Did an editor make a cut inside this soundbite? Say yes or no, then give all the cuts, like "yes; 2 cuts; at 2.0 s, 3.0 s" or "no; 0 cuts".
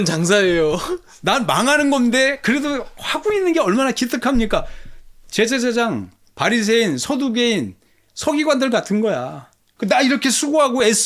yes; 1 cut; at 9.7 s